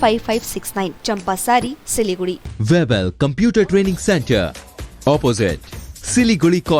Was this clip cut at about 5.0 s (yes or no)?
no